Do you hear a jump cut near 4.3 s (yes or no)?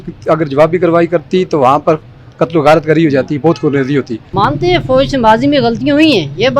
yes